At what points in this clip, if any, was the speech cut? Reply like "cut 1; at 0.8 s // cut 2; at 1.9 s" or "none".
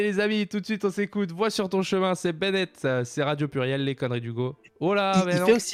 none